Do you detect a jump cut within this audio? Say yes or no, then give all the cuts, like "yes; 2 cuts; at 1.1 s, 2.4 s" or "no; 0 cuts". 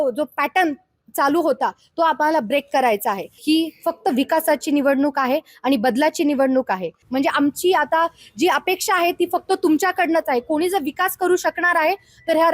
yes; 2 cuts; at 3.3 s, 6.9 s